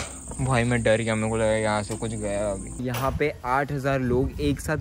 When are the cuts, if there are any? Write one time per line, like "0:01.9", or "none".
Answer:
0:02.7